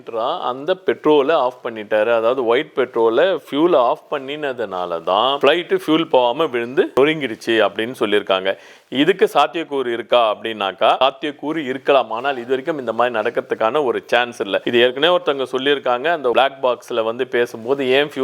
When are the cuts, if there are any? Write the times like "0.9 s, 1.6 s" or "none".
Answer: none